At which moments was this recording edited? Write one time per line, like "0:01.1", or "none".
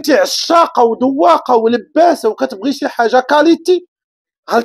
none

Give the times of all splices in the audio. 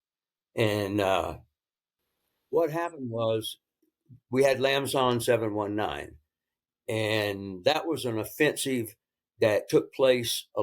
0:02.0

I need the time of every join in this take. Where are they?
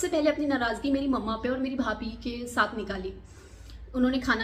none

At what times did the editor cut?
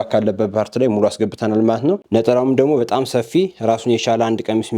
0:02.0

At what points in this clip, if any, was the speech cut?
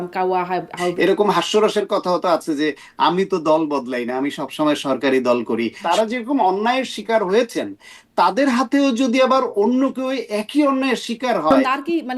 0:00.9
0:05.8
0:11.5

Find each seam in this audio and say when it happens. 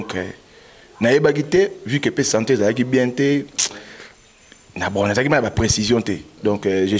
none

